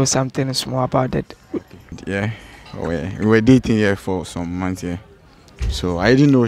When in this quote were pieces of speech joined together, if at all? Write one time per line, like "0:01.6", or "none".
0:02.0